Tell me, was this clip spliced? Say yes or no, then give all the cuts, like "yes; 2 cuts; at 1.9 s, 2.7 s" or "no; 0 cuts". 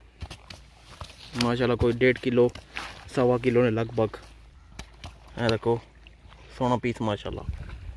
no; 0 cuts